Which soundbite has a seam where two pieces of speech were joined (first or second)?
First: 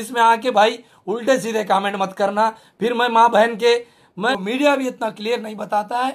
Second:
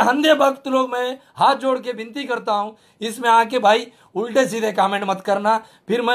first